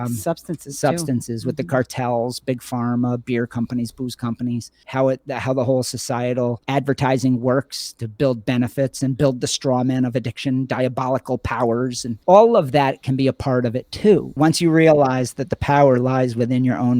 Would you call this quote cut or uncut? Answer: cut